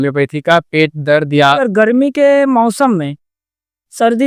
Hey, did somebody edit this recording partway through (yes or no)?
yes